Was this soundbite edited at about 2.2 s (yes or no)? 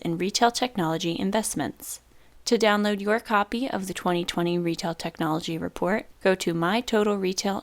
yes